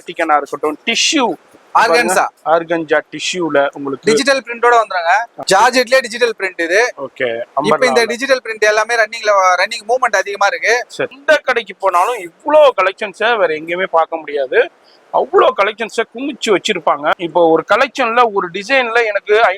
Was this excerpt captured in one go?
no; 3 cuts; at 5.3 s, 11.2 s, 17.1 s

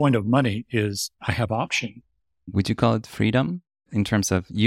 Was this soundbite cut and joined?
yes; 3 cuts; at 1.1 s, 2.4 s, 3.8 s

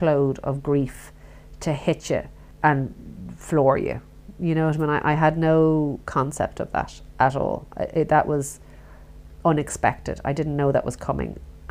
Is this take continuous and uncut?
no; 1 cut; at 2.4 s

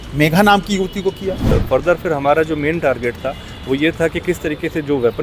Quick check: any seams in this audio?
yes; 1 cut; at 1.5 s

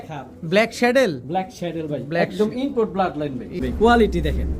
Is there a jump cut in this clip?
yes; 1 cut; at 3.6 s

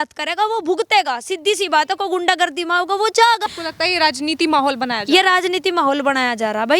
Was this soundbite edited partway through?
yes; 1 cut; at 3.6 s

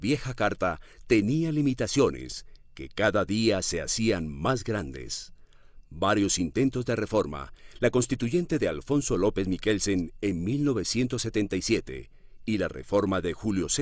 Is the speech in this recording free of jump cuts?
no; 1 cut; at 3.3 s

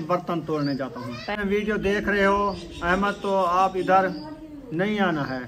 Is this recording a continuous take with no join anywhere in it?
no; 1 cut; at 1.3 s

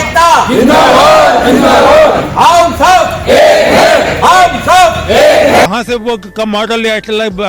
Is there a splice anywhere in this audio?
yes; 1 cut; at 5.7 s

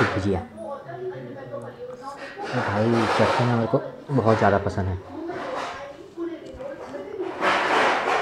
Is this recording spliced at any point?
no; 0 cuts

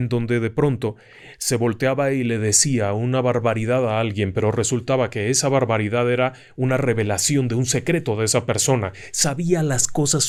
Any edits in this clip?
no; 0 cuts

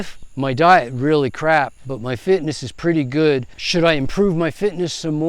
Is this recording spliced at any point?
yes; 1 cut; at 3.6 s

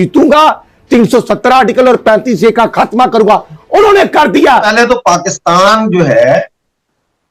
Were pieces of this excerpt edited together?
yes; 1 cut; at 4.7 s

